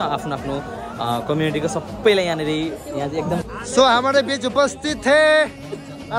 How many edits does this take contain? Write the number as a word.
one